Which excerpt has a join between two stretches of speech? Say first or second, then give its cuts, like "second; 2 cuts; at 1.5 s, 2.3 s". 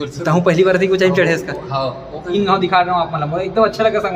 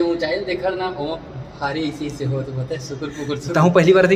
first; 1 cut; at 2.3 s